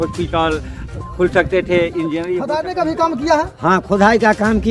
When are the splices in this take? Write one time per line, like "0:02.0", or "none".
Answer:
0:02.3